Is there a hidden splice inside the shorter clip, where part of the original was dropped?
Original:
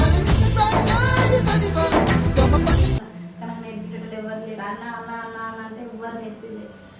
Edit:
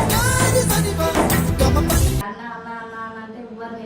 yes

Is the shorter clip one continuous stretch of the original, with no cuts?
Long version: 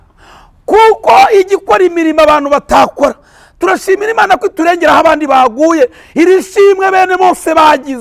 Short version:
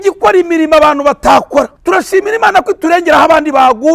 no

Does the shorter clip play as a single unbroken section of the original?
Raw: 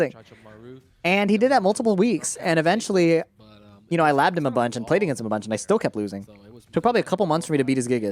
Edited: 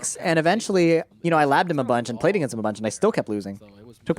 no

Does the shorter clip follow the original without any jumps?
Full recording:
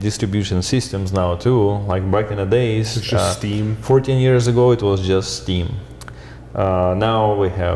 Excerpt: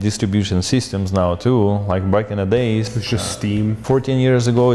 yes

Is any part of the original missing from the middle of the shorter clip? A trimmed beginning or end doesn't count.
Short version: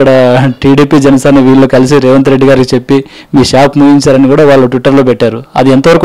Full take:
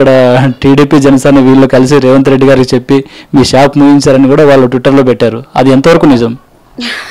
no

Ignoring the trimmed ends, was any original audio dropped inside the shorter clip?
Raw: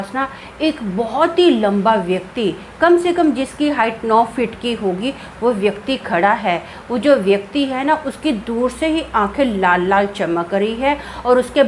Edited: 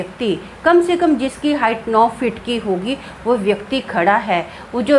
no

